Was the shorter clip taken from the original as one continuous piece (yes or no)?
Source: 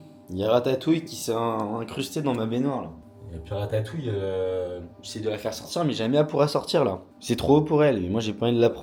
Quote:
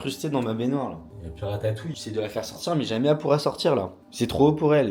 no